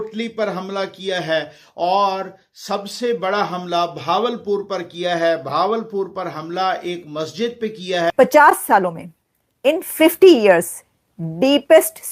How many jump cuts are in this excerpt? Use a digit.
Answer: 1